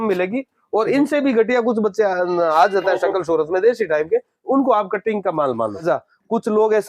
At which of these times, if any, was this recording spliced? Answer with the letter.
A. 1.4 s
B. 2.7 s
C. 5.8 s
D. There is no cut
C